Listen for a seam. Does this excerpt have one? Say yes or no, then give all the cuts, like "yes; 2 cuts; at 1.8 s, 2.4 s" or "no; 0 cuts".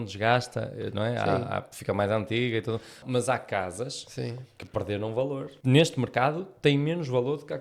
yes; 2 cuts; at 3.0 s, 5.5 s